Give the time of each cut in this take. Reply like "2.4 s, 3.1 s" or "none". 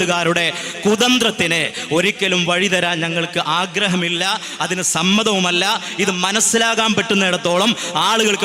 none